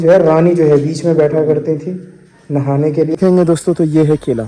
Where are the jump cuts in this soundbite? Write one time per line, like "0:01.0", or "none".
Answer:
0:03.2